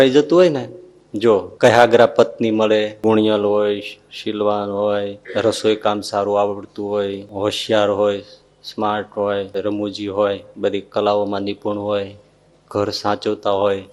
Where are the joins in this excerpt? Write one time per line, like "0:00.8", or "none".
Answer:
0:01.5
0:02.9
0:05.2
0:07.3
0:09.5
0:10.5